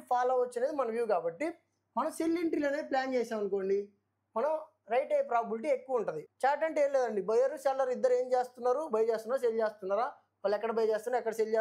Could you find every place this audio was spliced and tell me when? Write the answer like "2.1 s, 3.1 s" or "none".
6.2 s